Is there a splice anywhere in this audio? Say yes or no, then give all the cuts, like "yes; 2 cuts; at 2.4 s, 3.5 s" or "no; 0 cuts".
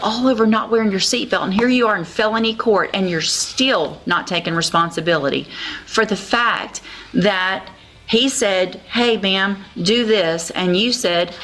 no; 0 cuts